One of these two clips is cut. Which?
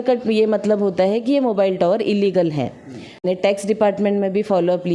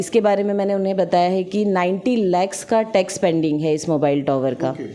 first; 1 cut; at 3.2 s

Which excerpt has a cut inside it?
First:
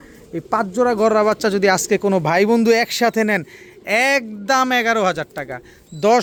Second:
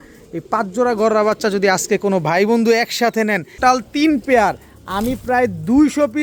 second; 1 cut; at 3.6 s

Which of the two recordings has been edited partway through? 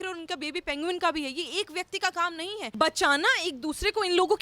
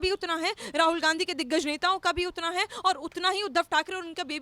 first; 1 cut; at 2.6 s

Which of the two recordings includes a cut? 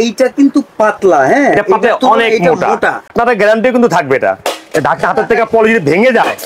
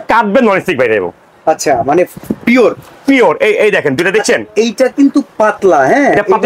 first; 1 cut; at 3.1 s

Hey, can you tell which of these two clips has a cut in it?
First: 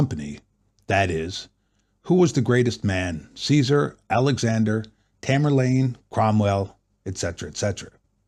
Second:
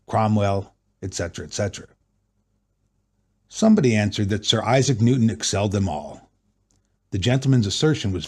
second; 1 cut; at 4.9 s

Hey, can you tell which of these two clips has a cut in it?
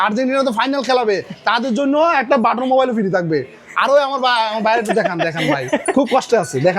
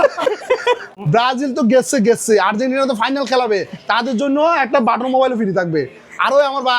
second; 1 cut; at 0.9 s

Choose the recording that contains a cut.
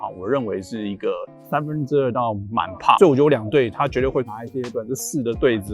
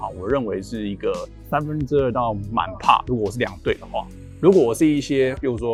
first; 1 cut; at 3.0 s

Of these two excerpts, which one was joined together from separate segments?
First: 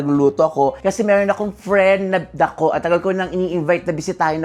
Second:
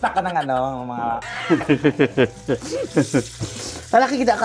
second; 1 cut; at 1.2 s

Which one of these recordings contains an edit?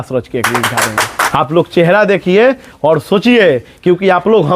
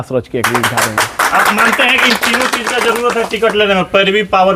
first; 1 cut; at 1.2 s

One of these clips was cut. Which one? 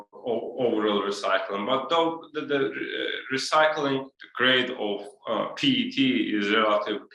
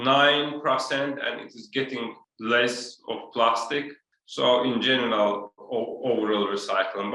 second; 1 cut; at 2.2 s

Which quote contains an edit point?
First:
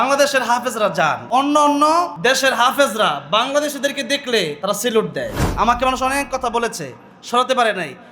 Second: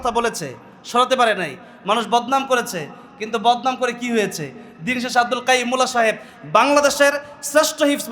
first; 4 cuts; at 1.2 s, 2.1 s, 4.6 s, 5.4 s

